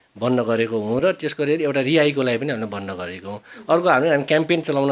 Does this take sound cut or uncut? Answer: uncut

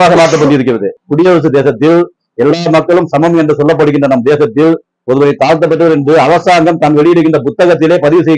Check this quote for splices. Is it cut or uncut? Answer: cut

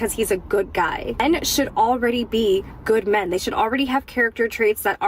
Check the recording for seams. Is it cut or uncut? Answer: cut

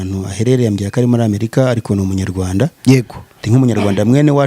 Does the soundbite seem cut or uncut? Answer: cut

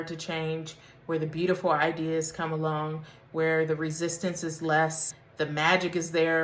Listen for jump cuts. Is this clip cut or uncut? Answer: cut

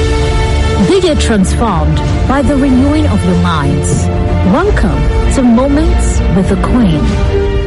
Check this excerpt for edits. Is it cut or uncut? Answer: uncut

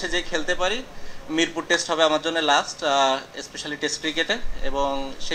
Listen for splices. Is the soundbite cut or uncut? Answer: uncut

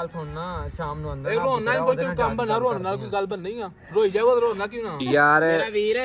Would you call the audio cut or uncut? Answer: uncut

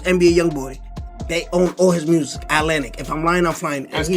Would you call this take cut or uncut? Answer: uncut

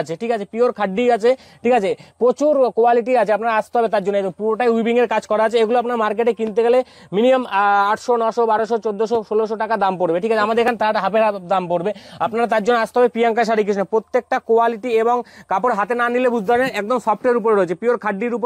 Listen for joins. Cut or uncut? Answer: uncut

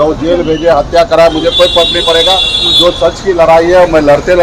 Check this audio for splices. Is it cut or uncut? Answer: uncut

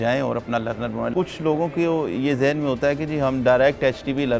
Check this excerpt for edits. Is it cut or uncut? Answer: cut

